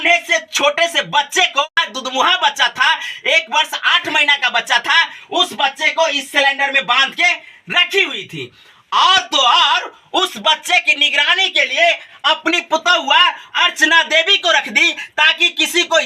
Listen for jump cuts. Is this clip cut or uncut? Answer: cut